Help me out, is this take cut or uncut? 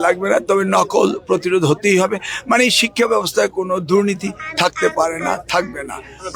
uncut